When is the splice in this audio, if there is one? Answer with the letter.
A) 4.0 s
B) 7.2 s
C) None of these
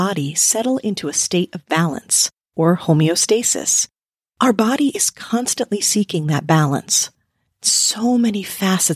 A